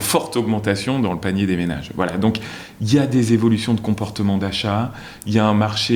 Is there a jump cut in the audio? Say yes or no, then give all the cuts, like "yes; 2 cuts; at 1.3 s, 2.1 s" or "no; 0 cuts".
no; 0 cuts